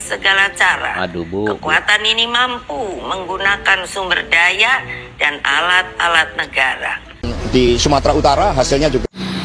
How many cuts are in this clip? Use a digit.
1